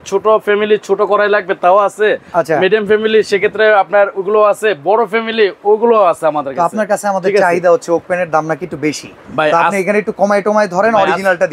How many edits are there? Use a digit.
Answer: 0